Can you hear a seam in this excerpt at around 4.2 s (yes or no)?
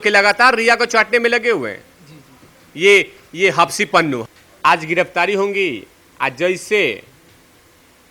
yes